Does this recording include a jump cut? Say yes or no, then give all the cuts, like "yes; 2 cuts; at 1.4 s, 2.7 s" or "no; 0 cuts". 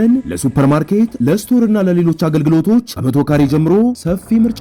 no; 0 cuts